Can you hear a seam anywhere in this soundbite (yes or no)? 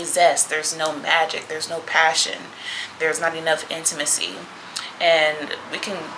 no